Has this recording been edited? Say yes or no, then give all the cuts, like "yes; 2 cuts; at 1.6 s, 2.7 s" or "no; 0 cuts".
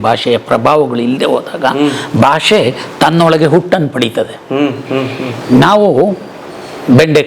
no; 0 cuts